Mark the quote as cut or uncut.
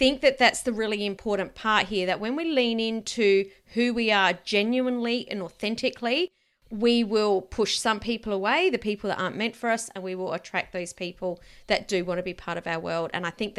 uncut